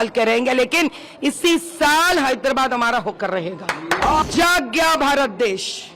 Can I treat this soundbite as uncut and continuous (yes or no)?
no